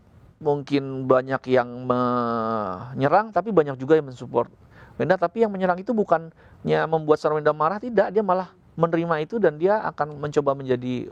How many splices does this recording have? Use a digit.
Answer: 0